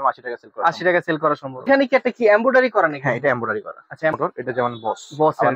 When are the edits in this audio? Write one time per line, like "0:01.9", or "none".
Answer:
0:01.7
0:04.1

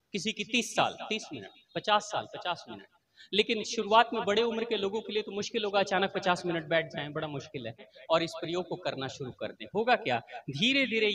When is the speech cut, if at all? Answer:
0:07.9

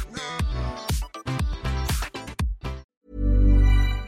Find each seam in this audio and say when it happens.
0:02.8

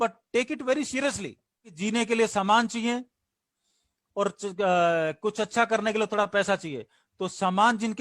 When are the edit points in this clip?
0:01.8

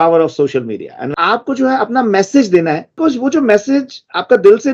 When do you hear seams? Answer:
0:01.1
0:02.8

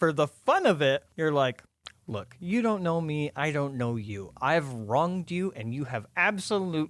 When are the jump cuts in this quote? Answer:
0:01.1

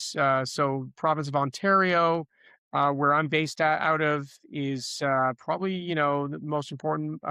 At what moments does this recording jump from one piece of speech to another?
none

